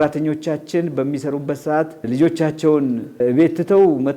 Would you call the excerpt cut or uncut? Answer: cut